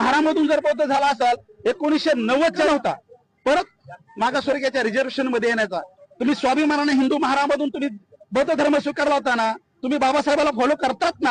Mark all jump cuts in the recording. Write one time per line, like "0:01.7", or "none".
0:02.7